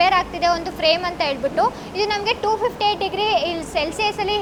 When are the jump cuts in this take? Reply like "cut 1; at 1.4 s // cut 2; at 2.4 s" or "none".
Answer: none